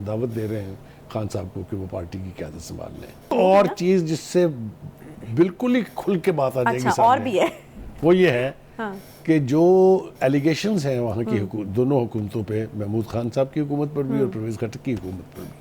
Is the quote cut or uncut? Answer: cut